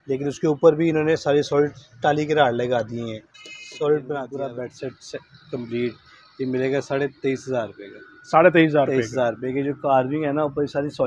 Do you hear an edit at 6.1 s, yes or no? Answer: no